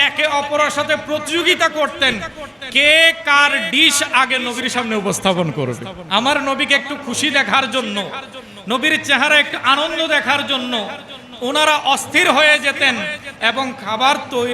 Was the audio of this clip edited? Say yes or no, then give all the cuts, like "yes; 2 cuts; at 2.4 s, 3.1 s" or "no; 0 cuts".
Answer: yes; 1 cut; at 5.9 s